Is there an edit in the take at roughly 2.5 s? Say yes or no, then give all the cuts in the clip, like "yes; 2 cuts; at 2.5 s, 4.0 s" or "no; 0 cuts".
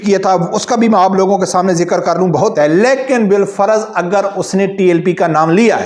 yes; 1 cut; at 2.5 s